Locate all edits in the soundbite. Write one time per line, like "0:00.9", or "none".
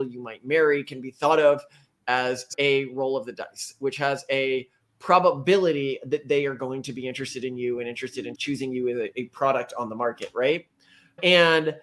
0:02.5
0:08.3